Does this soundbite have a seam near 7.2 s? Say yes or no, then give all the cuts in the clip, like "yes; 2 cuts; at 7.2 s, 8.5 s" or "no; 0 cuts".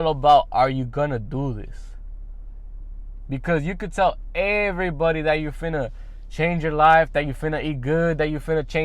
no; 0 cuts